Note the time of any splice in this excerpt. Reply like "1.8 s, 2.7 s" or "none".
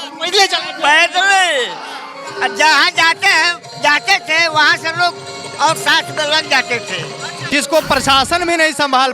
7.4 s